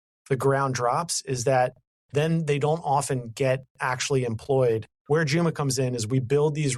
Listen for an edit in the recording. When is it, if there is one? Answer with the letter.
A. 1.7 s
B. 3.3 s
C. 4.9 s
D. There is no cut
C